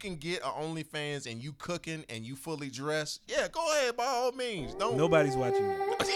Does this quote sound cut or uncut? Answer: uncut